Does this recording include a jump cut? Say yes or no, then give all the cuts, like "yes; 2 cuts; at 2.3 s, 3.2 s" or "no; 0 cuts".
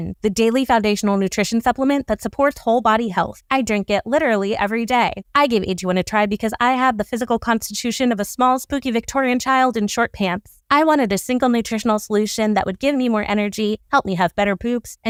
no; 0 cuts